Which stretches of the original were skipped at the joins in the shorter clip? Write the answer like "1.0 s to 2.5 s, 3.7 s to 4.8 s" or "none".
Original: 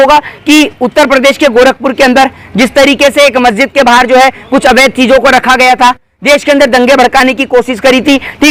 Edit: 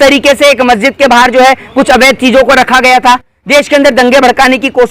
none